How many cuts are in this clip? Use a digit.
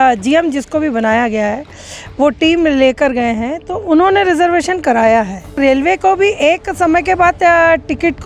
1